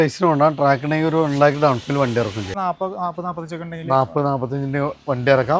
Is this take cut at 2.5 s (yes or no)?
yes